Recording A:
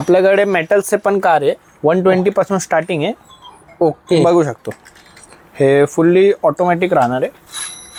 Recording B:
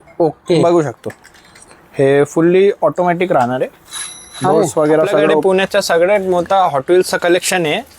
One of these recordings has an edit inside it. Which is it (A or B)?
B